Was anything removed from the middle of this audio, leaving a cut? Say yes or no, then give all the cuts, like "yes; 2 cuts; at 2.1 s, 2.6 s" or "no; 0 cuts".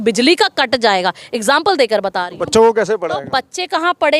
no; 0 cuts